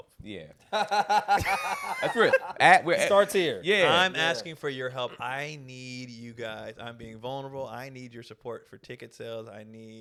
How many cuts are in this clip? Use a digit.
0